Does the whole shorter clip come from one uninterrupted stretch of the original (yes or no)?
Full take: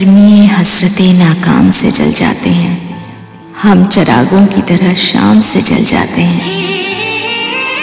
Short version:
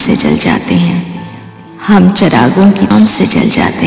no